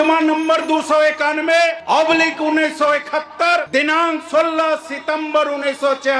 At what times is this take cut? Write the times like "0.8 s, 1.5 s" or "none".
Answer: 1.8 s, 3.7 s